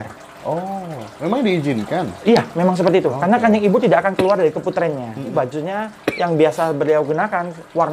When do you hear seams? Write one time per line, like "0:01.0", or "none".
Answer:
0:05.3